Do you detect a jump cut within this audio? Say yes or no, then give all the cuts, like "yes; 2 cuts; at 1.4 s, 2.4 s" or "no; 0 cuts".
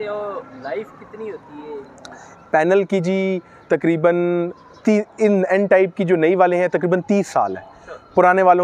no; 0 cuts